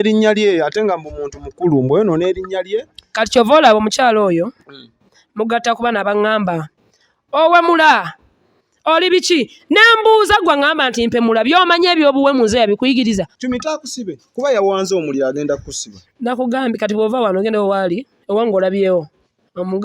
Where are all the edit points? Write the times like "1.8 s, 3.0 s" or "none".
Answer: 13.3 s

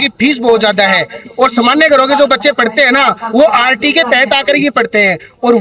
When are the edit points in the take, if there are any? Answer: none

